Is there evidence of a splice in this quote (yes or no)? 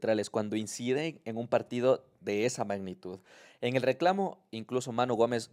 no